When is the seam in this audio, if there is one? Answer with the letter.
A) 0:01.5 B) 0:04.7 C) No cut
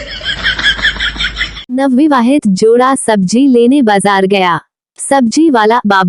A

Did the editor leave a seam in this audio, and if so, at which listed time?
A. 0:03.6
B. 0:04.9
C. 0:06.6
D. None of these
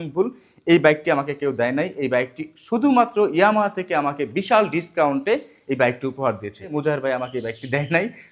C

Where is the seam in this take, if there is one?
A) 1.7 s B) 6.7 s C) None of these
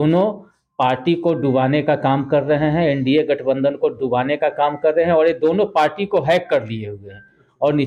C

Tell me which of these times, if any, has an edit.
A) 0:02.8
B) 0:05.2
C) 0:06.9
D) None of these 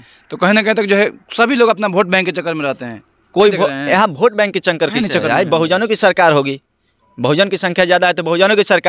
D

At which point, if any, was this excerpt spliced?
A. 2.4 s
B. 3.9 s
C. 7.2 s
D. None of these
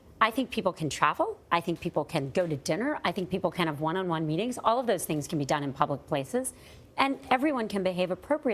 D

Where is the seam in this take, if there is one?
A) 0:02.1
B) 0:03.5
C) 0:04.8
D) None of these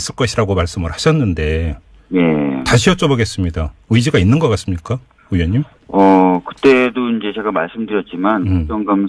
B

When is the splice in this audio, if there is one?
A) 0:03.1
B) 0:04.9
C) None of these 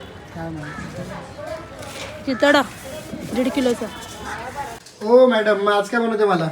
B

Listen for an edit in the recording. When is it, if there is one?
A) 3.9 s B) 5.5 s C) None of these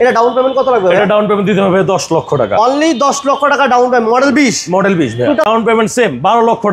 B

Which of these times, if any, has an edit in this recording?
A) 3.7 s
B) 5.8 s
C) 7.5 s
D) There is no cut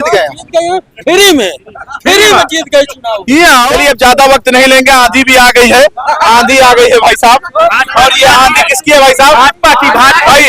A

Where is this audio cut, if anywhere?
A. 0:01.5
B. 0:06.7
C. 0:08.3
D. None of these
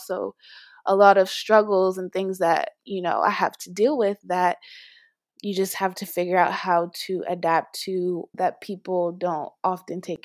C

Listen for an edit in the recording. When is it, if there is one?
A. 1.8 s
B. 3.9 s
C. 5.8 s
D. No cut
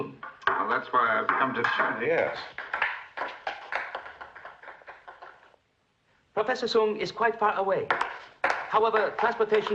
D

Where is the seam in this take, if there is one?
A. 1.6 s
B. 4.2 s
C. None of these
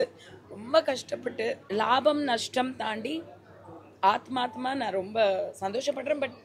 A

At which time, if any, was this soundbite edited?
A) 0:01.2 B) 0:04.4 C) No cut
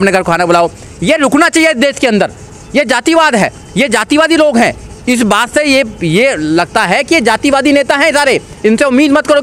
C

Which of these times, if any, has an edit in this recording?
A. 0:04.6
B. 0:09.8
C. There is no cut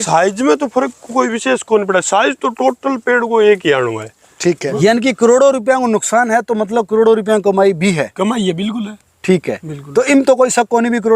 A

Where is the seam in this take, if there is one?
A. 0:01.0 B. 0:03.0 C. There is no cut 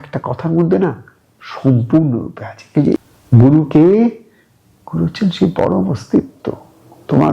B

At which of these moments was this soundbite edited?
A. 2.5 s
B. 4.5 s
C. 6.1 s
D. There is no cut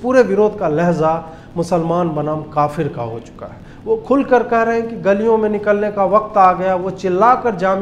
D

